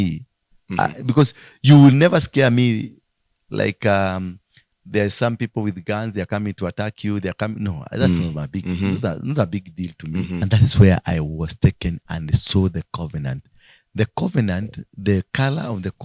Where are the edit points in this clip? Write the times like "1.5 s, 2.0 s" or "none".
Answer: 10.3 s